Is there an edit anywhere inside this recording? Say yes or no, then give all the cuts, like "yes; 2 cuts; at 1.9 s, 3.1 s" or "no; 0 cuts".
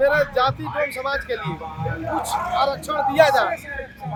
no; 0 cuts